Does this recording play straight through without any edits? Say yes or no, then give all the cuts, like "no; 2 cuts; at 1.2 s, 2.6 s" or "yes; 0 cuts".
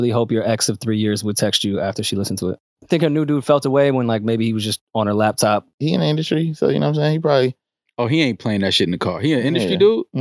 no; 2 cuts; at 2.8 s, 5.7 s